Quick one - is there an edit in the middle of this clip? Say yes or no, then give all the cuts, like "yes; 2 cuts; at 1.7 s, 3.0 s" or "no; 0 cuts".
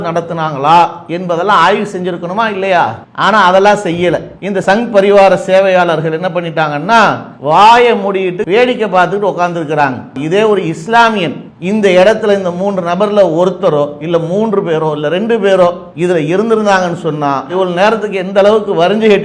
yes; 2 cuts; at 8.4 s, 10.2 s